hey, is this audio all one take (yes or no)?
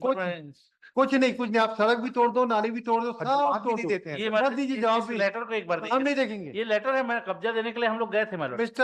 yes